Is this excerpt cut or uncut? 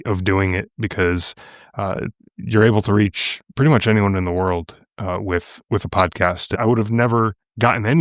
cut